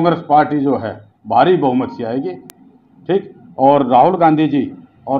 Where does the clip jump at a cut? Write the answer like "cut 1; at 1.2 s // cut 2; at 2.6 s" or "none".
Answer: none